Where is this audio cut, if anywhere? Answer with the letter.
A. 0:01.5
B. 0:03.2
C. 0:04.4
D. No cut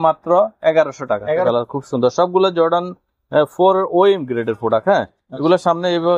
A